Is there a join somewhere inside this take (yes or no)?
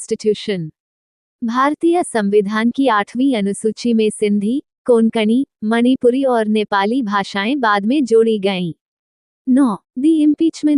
yes